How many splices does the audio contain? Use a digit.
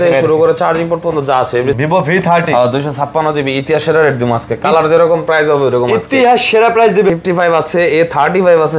2